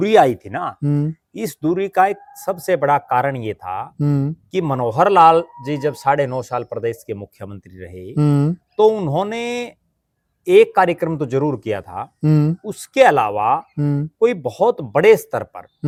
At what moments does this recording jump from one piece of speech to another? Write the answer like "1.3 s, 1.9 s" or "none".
none